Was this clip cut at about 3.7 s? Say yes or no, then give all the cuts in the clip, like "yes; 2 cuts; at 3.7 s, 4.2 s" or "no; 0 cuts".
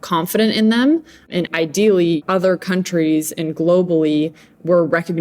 no; 2 cuts; at 1.5 s, 2.2 s